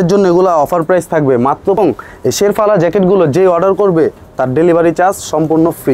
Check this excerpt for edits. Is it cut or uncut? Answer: cut